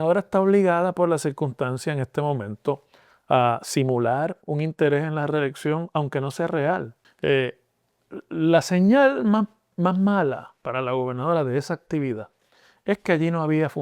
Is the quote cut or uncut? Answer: cut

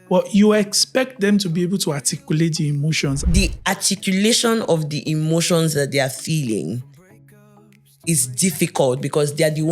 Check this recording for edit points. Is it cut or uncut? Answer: cut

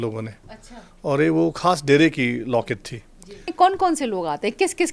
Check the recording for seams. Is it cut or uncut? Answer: cut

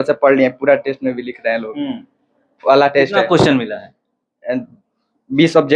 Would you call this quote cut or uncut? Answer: uncut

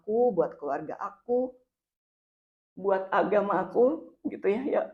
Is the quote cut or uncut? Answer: uncut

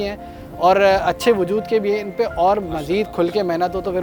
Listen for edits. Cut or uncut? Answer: uncut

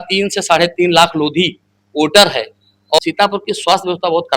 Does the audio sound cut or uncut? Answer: cut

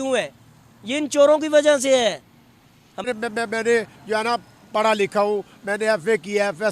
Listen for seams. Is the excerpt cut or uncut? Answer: cut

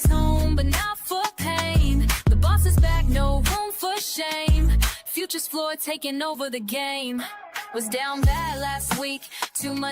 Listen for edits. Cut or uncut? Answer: cut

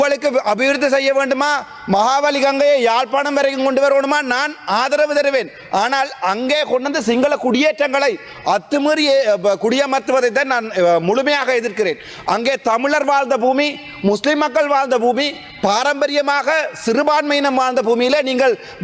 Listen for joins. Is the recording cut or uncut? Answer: uncut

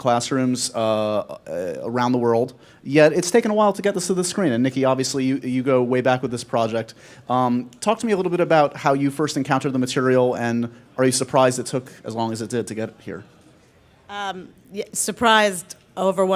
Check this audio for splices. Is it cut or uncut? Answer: cut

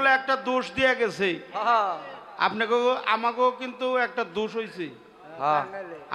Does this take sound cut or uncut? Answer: uncut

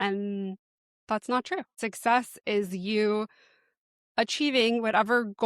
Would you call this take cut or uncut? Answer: cut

